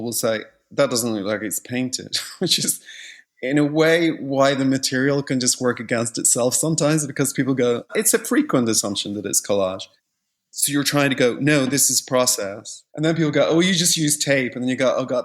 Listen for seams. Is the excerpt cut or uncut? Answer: uncut